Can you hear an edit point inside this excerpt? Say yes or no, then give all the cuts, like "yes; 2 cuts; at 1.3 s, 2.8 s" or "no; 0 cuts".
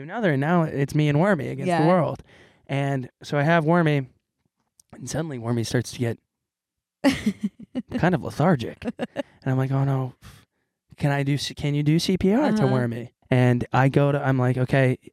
yes; 1 cut; at 13.1 s